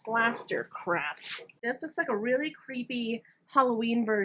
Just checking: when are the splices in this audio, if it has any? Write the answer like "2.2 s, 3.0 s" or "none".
1.6 s